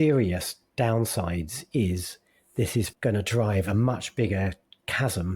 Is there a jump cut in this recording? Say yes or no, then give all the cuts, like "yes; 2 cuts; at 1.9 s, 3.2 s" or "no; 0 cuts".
yes; 1 cut; at 2.9 s